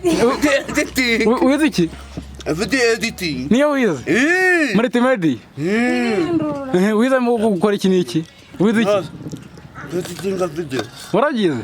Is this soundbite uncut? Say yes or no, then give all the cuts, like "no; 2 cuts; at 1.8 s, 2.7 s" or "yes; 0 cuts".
no; 1 cut; at 8.6 s